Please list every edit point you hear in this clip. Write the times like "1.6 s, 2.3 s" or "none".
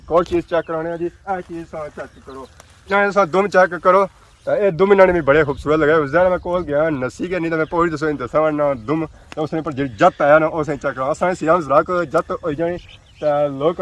1.2 s, 2.8 s